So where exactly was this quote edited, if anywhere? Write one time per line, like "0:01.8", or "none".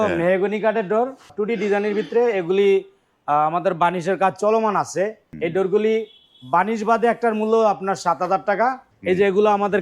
0:01.3
0:05.2
0:08.9